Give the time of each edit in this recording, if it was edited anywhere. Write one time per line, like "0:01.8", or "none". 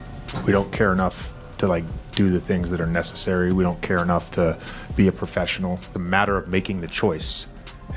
0:05.9